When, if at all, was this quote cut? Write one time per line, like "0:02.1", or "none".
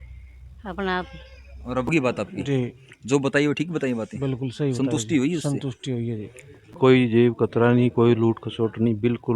0:01.9
0:06.8